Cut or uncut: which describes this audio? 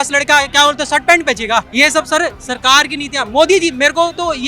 cut